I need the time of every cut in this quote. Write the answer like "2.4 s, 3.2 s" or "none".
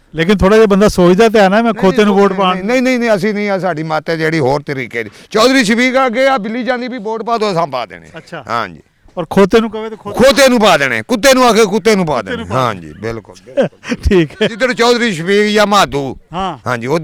none